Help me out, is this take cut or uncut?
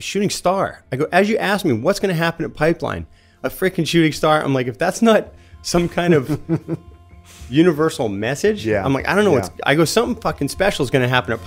uncut